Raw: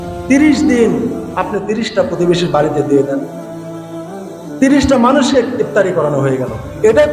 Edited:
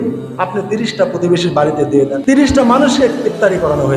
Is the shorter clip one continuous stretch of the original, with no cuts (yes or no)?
no